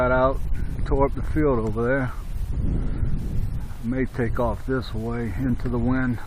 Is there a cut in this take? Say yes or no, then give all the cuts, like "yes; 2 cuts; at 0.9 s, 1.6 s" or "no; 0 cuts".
yes; 1 cut; at 3.3 s